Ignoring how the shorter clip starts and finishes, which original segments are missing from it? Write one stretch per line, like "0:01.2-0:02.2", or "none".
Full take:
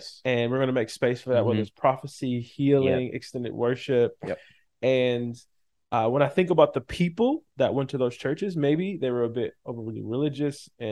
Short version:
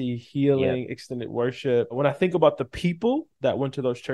0:04.2-0:06.1